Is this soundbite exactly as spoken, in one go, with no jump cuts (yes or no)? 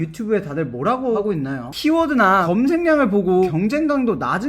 no